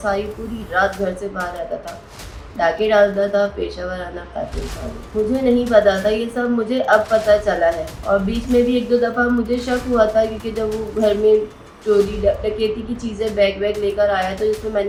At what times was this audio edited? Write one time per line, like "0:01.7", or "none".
none